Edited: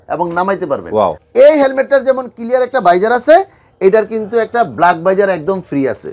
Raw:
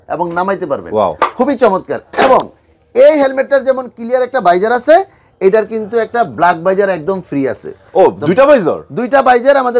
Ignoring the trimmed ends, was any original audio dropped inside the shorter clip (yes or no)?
yes